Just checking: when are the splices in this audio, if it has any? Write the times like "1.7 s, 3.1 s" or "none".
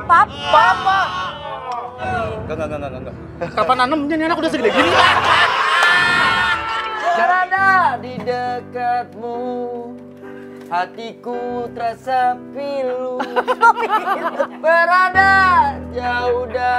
2.1 s, 6.9 s